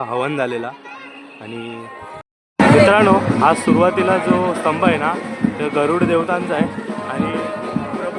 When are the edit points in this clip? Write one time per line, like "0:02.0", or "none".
0:02.2